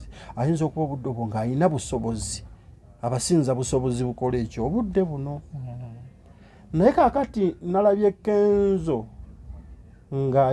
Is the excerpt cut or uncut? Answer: uncut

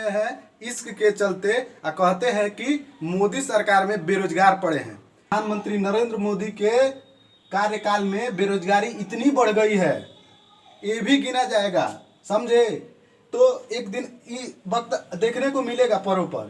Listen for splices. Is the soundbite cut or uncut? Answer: cut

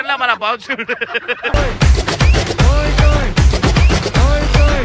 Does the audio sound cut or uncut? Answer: uncut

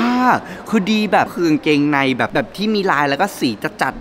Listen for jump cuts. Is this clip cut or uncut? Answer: cut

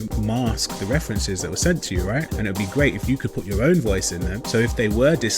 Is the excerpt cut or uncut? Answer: cut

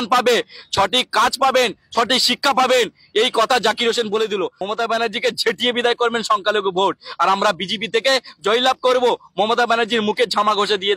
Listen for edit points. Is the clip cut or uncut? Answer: cut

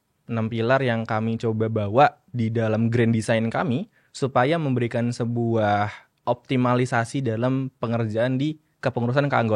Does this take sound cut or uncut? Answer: uncut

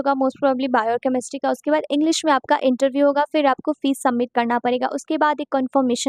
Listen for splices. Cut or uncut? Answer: uncut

